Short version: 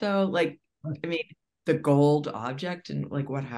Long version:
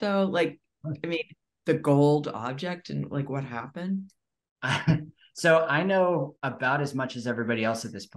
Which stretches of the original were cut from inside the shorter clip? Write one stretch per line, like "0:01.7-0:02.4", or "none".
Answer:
none